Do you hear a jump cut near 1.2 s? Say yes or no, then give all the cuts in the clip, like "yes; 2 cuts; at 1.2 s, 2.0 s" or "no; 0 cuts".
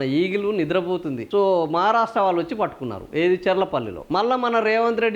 yes; 1 cut; at 1.2 s